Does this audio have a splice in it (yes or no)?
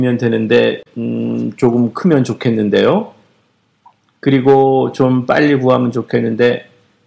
yes